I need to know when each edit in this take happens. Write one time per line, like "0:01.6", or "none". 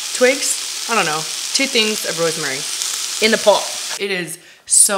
0:03.8